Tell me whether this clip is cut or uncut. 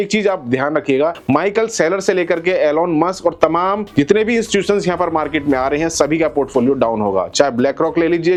uncut